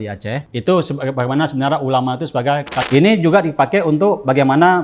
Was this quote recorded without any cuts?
no; 1 cut; at 2.8 s

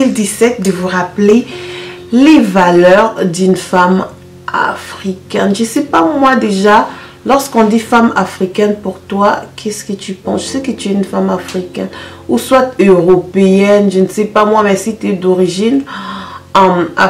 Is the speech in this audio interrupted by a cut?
no; 0 cuts

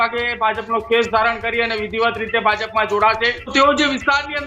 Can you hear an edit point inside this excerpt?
yes; 1 cut; at 3.5 s

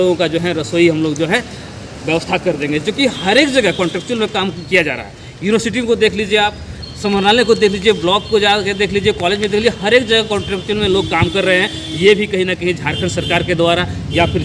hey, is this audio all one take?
yes; 0 cuts

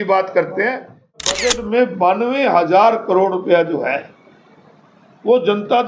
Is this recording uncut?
no; 1 cut; at 1.2 s

